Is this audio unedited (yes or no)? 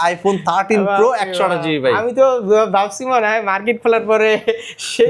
yes